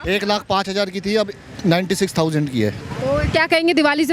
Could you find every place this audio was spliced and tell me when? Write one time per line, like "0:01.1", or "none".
none